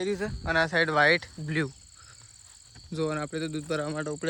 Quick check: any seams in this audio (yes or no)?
no